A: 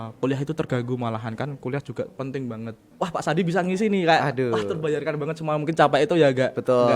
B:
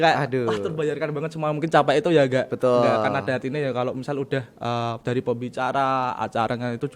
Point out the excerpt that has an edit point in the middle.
A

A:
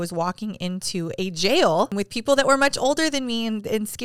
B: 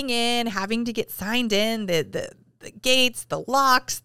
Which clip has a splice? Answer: A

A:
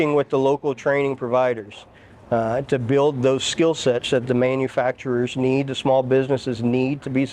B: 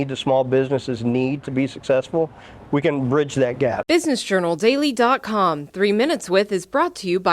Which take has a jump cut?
B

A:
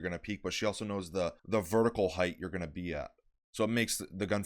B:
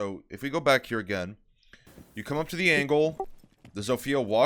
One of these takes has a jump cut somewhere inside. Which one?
A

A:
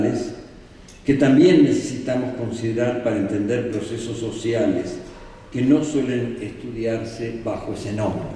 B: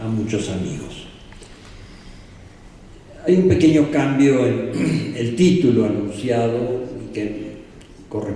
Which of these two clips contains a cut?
A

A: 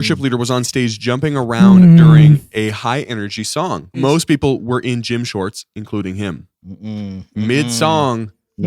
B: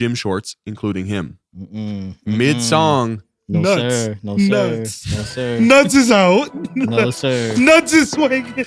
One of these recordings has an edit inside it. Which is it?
A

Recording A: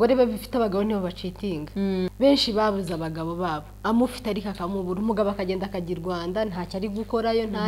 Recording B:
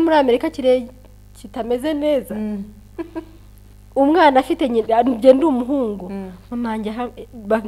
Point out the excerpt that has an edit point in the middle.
A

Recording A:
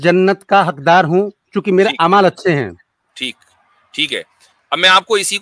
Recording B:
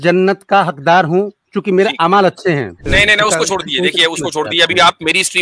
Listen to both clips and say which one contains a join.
B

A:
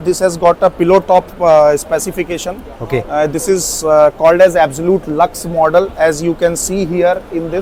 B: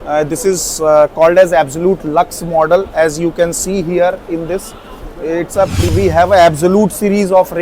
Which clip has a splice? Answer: B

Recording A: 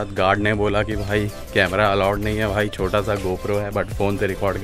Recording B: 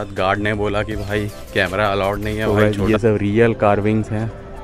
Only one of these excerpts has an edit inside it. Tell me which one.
B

